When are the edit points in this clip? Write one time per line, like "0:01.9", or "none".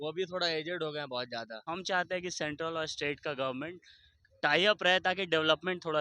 0:01.6